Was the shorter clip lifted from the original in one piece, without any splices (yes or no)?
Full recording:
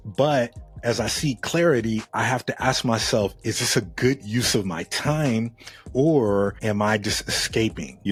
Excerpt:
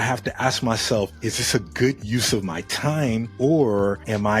no